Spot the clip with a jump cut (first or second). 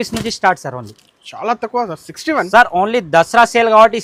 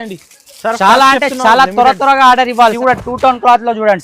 second